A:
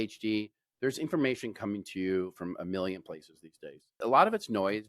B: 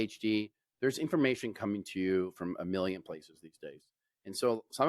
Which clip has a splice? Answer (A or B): A